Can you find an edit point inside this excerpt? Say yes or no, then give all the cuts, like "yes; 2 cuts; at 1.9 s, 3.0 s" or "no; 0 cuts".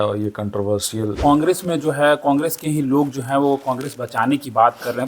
yes; 1 cut; at 1.2 s